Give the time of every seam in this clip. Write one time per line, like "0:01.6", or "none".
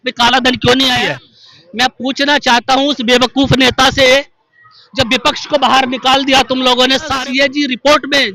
0:01.0
0:07.1

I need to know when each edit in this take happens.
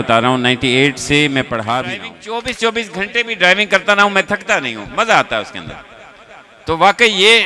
0:02.6

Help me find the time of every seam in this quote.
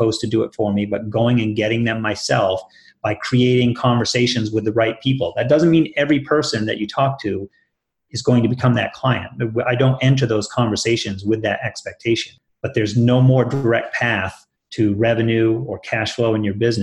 0:12.4

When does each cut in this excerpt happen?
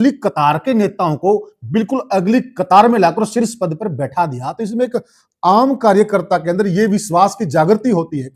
none

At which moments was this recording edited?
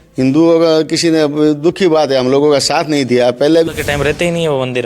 0:03.7

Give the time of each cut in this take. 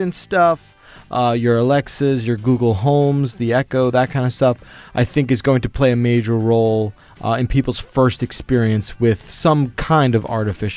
none

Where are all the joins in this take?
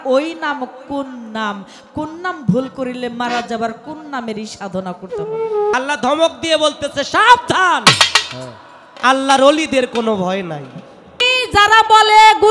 0:05.7
0:11.2

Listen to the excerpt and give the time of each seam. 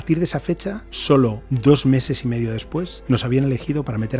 0:00.9
0:01.5
0:02.9

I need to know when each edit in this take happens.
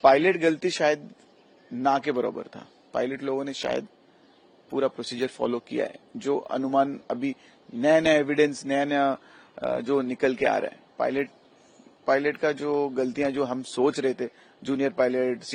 none

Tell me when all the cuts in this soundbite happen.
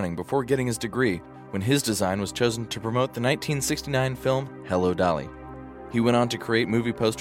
none

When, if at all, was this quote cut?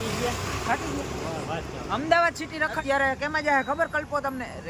0:02.8

